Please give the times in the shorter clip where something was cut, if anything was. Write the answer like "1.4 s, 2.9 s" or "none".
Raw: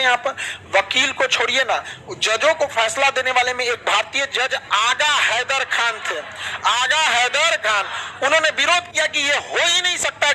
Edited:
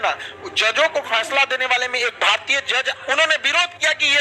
3.0 s